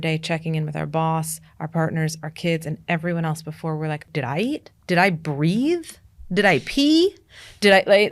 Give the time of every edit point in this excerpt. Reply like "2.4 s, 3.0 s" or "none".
4.7 s